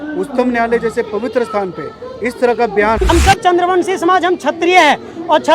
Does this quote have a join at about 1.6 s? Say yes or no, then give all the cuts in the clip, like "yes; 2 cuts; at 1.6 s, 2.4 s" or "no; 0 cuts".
no; 1 cut; at 3.0 s